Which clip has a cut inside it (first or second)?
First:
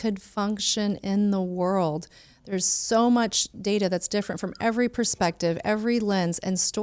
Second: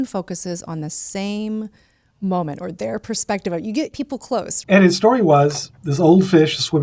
second